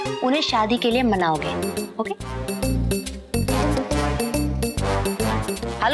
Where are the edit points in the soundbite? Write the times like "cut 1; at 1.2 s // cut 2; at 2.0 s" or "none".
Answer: none